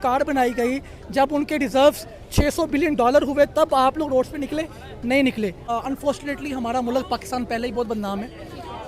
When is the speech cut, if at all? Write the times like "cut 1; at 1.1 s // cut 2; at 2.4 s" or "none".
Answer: cut 1; at 5.6 s